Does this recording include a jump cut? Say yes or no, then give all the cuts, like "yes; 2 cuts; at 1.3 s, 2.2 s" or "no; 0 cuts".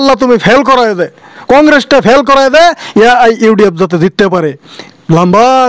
no; 0 cuts